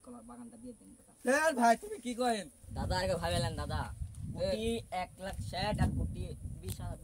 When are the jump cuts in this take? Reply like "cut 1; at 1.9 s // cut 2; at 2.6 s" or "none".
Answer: cut 1; at 2.7 s